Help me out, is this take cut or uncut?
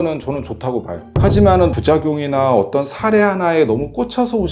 cut